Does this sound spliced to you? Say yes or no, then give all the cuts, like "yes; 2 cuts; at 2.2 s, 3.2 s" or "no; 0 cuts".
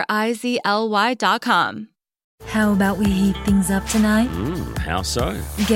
yes; 1 cut; at 2.2 s